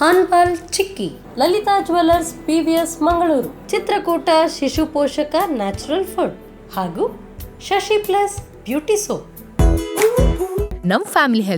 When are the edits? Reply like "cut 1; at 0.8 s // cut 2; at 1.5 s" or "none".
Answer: cut 1; at 9.4 s